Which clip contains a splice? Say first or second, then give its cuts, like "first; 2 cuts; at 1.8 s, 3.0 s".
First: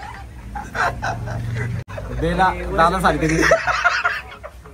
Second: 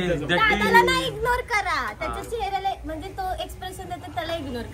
first; 1 cut; at 1.8 s